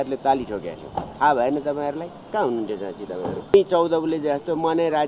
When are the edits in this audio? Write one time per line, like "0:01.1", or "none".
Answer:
0:03.5